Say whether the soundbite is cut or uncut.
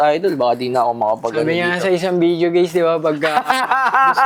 uncut